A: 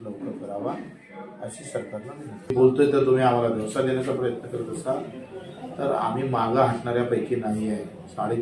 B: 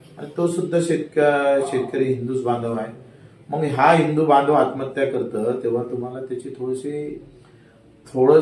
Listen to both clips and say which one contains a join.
A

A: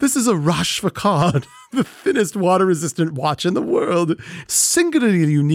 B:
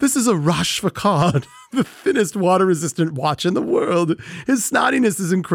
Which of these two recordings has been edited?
A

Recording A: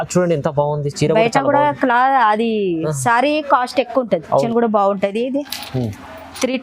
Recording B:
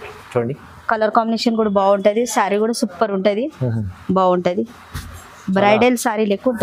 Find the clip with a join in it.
A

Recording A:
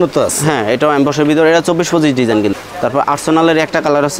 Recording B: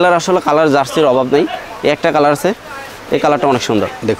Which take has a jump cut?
A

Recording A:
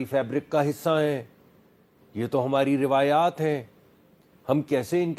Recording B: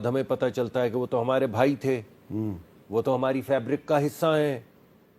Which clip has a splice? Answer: B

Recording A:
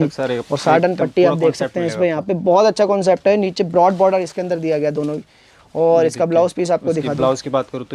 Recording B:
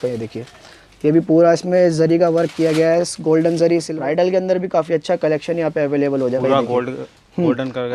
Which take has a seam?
B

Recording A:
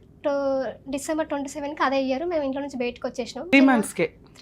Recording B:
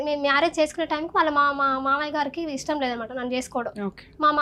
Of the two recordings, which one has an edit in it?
A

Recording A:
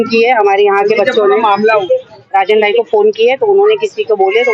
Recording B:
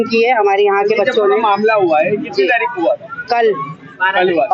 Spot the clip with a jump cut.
A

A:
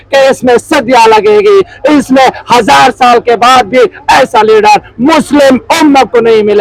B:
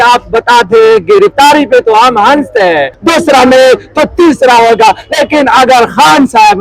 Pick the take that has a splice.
B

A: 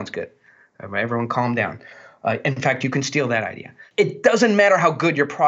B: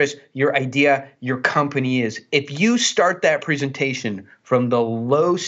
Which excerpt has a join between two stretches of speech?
A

